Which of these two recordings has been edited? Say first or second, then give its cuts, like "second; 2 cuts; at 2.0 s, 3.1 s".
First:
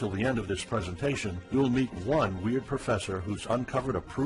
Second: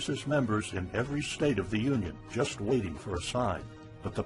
second; 1 cut; at 3.0 s